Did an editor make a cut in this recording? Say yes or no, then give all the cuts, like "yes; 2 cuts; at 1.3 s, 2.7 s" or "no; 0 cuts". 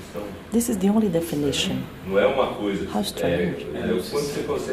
yes; 1 cut; at 2.5 s